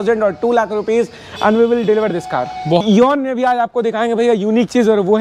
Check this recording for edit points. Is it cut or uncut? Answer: cut